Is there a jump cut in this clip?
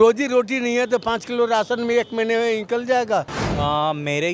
yes; 1 cut; at 3.4 s

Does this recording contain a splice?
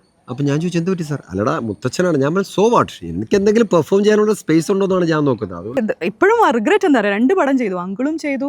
yes; 1 cut; at 5.8 s

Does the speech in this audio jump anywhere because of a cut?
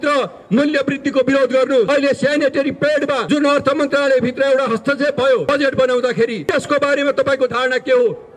yes; 4 cuts; at 1.9 s, 3.2 s, 5.5 s, 6.4 s

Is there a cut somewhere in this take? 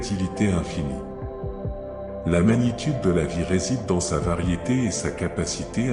yes; 2 cuts; at 0.9 s, 2.1 s

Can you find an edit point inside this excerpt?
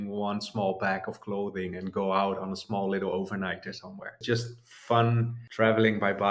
yes; 2 cuts; at 4.2 s, 5.4 s

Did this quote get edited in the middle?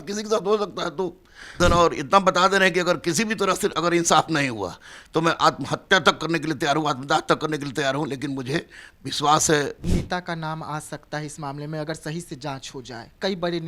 yes; 2 cuts; at 1.6 s, 9.8 s

